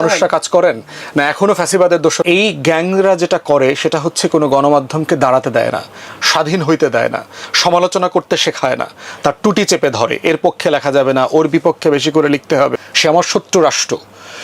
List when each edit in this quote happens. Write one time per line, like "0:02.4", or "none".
0:02.2
0:12.7